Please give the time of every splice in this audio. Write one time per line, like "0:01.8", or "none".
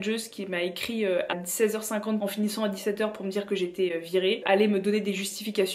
0:01.3